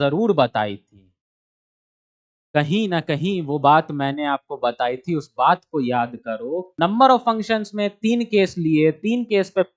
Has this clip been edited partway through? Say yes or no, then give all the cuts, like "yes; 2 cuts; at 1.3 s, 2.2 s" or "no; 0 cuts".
yes; 1 cut; at 6.7 s